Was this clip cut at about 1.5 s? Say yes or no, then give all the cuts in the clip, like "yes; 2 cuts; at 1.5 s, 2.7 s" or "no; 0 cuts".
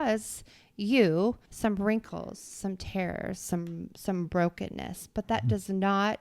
yes; 1 cut; at 1.5 s